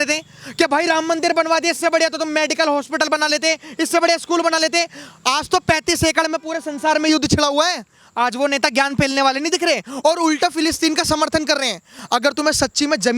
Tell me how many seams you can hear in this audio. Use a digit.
1